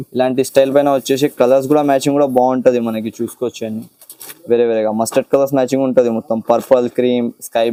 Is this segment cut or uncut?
uncut